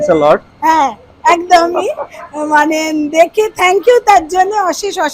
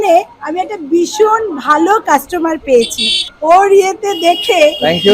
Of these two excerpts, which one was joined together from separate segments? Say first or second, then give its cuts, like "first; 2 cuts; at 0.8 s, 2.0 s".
second; 1 cut; at 3.2 s